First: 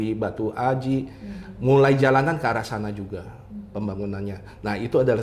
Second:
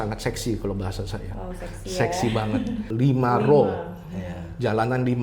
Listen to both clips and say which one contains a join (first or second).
second